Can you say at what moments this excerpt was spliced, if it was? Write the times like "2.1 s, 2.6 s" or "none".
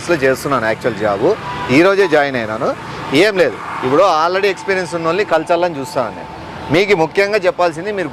none